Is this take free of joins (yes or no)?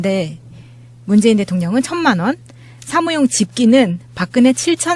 yes